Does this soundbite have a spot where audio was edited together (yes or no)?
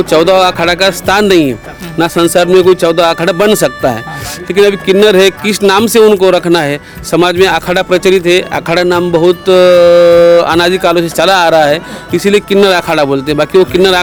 no